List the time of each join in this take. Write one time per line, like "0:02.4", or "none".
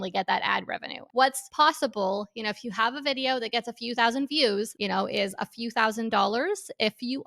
0:01.2
0:04.7